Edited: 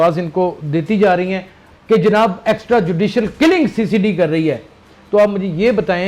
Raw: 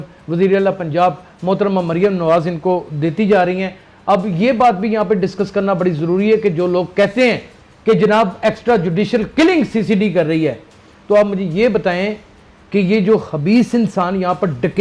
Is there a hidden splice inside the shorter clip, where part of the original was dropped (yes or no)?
yes